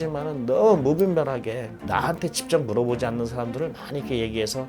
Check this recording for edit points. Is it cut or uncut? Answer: cut